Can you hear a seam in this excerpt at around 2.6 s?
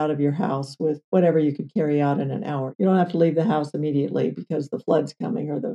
yes; 2 cuts; at 1.0 s, 2.6 s

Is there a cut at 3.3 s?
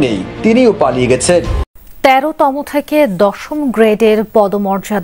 no; 1 cut; at 1.7 s

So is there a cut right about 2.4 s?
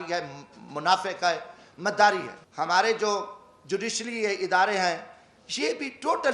yes; 1 cut; at 2.4 s

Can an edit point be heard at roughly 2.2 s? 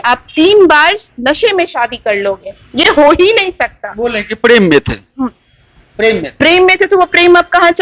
no; 0 cuts

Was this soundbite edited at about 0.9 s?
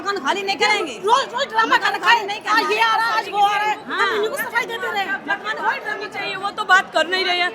no; 0 cuts

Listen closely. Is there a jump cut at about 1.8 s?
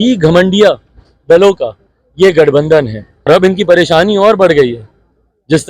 no; 1 cut; at 3.3 s

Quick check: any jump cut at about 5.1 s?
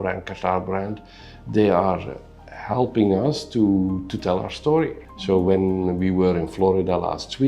yes; 1 cut; at 5.1 s

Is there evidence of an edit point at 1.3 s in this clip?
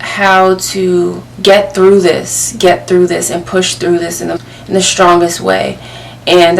yes; 2 cuts; at 1.3 s, 4.4 s

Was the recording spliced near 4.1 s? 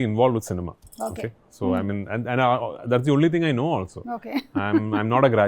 no; 0 cuts

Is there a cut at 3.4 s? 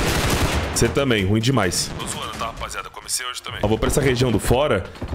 yes; 2 cuts; at 1.8 s, 3.4 s

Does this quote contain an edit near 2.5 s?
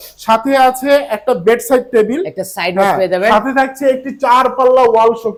no; 0 cuts

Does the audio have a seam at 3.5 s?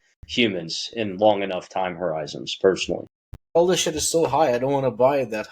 yes; 1 cut; at 3.5 s

